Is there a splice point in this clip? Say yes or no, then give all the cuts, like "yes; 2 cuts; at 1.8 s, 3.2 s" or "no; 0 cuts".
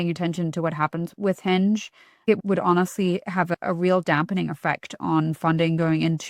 yes; 3 cuts; at 1.1 s, 2.3 s, 3.5 s